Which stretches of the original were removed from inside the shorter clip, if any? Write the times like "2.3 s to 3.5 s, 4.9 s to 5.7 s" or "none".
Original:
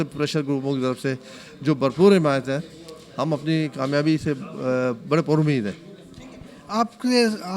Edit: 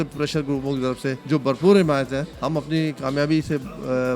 1.2 s to 1.6 s, 2.7 s to 3.1 s